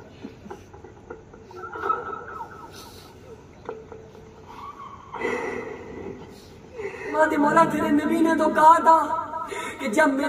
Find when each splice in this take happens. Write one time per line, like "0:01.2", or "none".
0:07.2

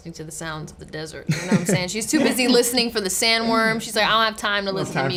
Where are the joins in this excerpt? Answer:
none

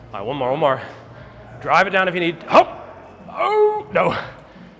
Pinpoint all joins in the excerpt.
none

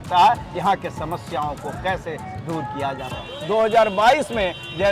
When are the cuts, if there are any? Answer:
0:03.2

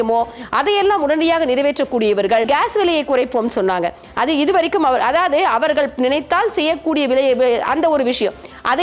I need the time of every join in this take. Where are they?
0:02.5

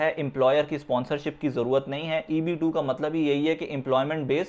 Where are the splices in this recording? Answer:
none

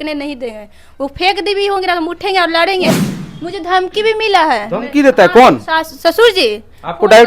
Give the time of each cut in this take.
0:03.0

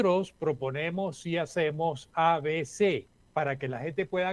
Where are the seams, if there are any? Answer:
0:03.2

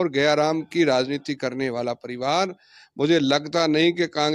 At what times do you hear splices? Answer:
none

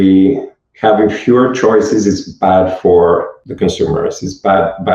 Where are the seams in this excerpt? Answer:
0:03.4

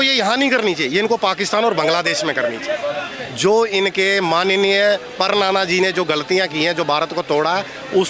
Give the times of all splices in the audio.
none

